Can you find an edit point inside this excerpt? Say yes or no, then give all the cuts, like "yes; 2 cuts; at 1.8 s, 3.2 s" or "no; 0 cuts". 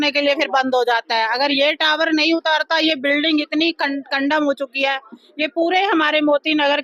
no; 0 cuts